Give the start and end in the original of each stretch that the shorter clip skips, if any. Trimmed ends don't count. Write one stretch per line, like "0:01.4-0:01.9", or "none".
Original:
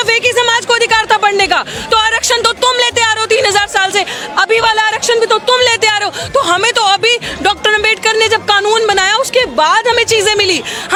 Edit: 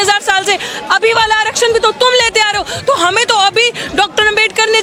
none